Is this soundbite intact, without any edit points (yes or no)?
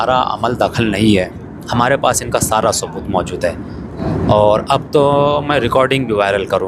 no